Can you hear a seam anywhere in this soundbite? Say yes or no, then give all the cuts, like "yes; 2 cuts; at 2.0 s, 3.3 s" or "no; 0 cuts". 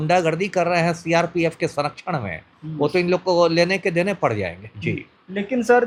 no; 0 cuts